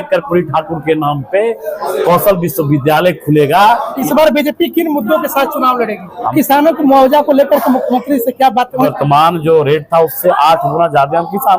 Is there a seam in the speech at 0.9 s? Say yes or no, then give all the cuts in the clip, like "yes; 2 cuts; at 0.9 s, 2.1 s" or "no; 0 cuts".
no; 3 cuts; at 3.9 s, 6.3 s, 8.9 s